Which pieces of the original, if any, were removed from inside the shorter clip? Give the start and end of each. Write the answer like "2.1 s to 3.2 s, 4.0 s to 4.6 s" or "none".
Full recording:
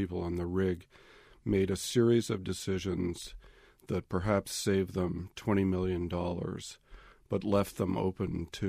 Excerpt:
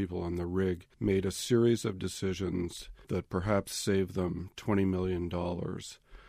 0.9 s to 1.3 s, 3.3 s to 3.7 s